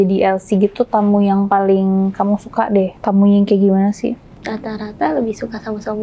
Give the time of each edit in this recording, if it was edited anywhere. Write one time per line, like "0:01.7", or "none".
0:03.0
0:04.3

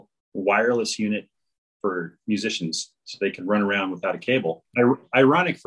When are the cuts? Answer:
0:04.6

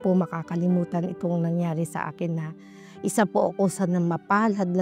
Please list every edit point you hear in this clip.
none

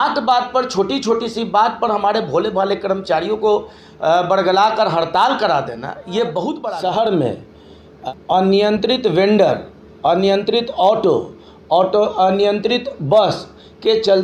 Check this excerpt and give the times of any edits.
0:06.7
0:08.0

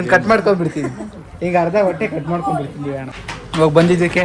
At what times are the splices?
0:03.2

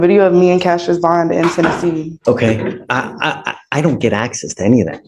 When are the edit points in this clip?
0:02.1

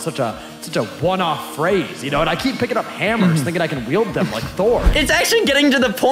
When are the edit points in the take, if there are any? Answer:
0:05.0

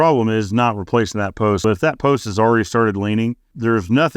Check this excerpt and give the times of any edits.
0:01.6

